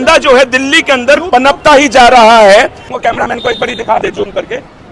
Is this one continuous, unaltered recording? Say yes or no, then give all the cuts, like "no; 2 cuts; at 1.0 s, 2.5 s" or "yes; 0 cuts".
yes; 0 cuts